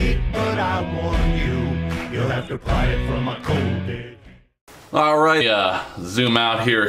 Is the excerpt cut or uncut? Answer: uncut